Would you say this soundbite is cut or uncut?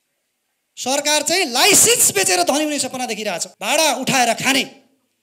cut